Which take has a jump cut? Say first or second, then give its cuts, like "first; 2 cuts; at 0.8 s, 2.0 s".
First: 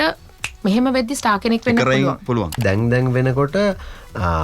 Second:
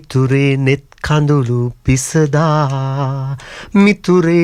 first; 1 cut; at 2.6 s